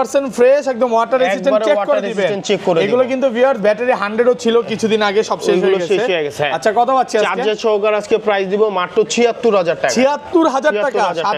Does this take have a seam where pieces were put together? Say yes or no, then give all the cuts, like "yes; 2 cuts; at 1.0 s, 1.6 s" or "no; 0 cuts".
no; 0 cuts